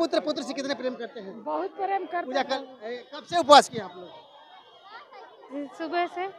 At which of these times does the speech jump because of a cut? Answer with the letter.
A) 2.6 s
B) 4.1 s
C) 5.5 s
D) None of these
A